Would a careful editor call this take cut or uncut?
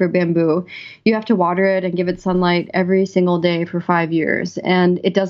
uncut